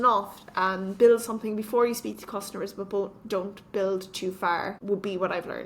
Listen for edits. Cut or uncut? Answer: cut